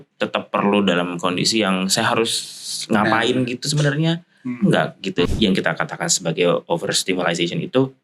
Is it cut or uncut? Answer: cut